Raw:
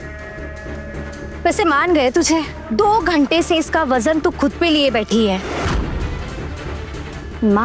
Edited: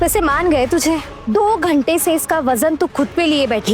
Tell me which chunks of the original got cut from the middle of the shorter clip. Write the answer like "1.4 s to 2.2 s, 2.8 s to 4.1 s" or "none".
none